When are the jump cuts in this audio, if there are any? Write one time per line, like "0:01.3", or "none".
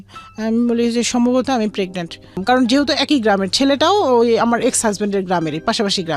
0:02.4